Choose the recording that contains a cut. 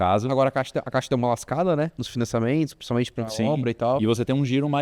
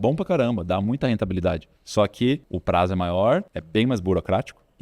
second; 3 cuts; at 1.7 s, 2.5 s, 3.6 s

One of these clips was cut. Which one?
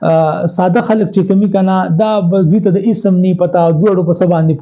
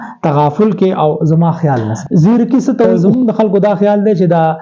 second; 2 cuts; at 2.0 s, 3.0 s

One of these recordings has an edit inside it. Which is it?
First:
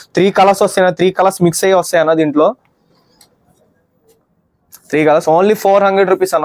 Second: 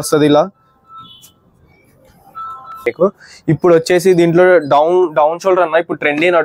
second; 1 cut; at 2.8 s

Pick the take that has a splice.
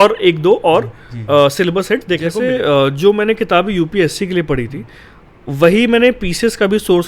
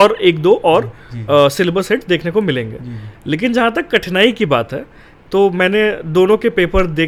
first; 1 cut; at 2.4 s

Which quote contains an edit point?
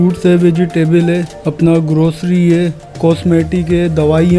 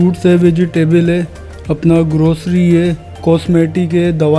first; 1 cut; at 1.4 s

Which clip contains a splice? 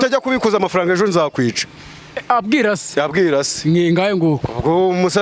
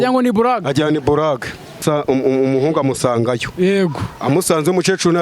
second; 1 cut; at 1.8 s

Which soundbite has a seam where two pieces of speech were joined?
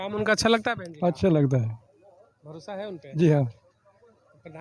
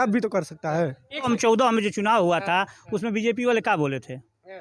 second; 1 cut; at 1.3 s

